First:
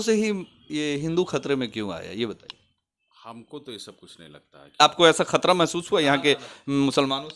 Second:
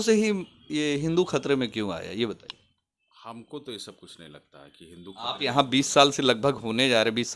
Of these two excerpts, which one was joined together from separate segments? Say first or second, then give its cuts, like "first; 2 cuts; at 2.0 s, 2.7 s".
first; 1 cut; at 5.0 s